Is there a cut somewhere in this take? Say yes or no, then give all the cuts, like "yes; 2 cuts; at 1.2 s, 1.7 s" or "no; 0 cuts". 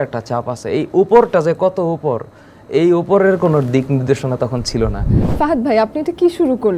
yes; 1 cut; at 5.3 s